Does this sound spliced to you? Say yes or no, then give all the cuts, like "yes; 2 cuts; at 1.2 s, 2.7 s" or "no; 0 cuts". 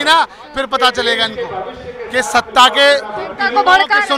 no; 0 cuts